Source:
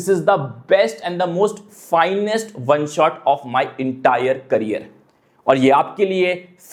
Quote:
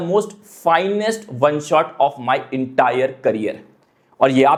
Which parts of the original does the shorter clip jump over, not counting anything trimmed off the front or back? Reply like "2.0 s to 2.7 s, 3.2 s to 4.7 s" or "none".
none